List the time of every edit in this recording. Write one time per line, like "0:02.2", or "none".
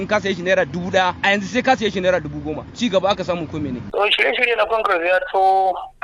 0:01.2
0:02.6
0:03.8